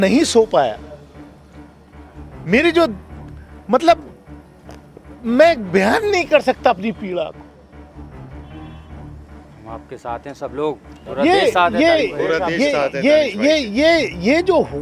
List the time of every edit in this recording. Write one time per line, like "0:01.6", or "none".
0:07.5
0:09.5